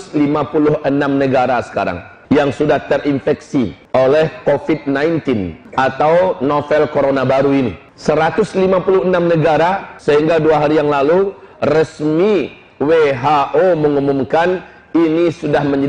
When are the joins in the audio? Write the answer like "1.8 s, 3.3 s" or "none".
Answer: 2.1 s, 3.8 s, 5.6 s, 7.9 s, 9.9 s